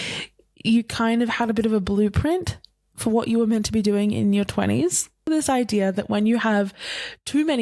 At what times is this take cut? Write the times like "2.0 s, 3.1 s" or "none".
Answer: 5.3 s